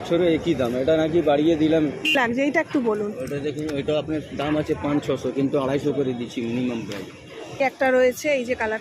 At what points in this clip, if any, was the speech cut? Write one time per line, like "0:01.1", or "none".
0:02.2
0:07.6